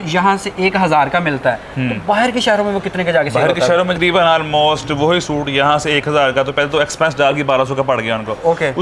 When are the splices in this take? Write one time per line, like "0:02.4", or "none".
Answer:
0:03.9